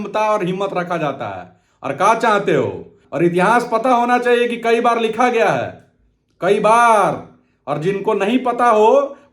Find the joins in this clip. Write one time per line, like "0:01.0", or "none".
0:03.0